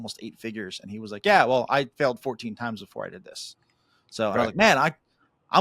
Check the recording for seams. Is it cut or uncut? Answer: uncut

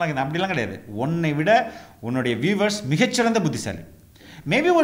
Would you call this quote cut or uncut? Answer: uncut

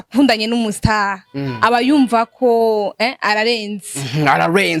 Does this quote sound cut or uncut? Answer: uncut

